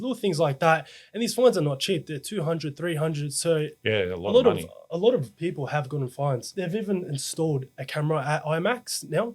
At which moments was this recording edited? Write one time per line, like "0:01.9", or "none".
0:06.5